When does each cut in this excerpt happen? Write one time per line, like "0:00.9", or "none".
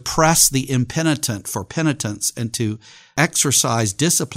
0:02.9